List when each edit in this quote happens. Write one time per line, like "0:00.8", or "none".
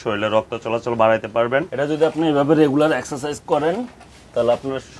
0:01.7